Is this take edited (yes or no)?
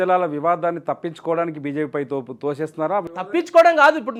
no